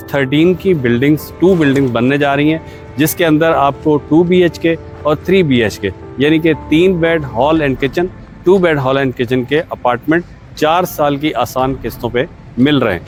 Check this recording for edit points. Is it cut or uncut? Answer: uncut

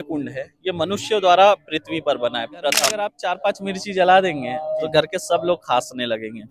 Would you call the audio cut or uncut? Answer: cut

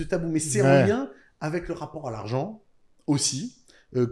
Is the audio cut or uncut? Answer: uncut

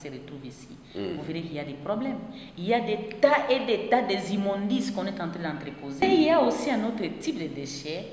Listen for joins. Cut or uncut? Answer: cut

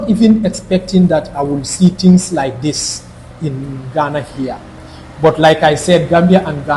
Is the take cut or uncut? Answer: uncut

